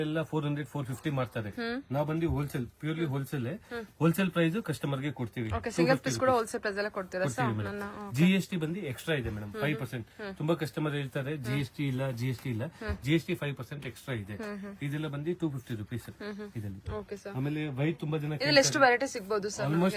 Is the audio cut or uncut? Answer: uncut